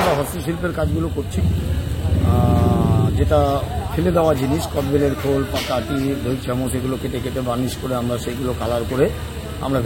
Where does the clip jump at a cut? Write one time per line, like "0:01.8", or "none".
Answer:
none